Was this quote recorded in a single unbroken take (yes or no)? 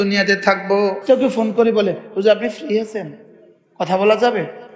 no